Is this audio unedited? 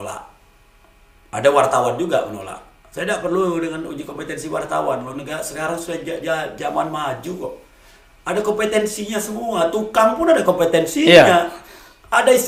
yes; 0 cuts

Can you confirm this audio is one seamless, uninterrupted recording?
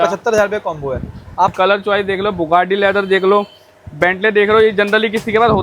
no; 1 cut; at 1.5 s

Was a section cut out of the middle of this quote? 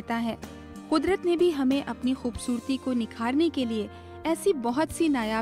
no; 0 cuts

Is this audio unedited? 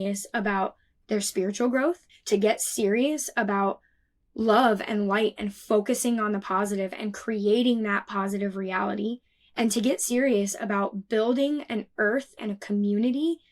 no; 2 cuts; at 2.1 s, 12.4 s

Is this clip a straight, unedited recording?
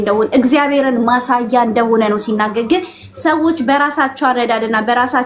yes; 0 cuts

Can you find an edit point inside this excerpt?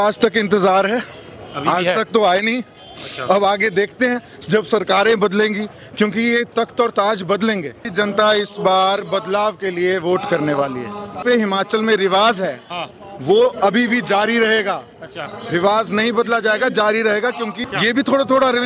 yes; 3 cuts; at 7.8 s, 11.2 s, 17.6 s

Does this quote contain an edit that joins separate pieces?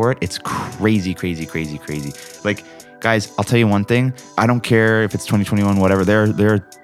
yes; 2 cuts; at 2.8 s, 4.2 s

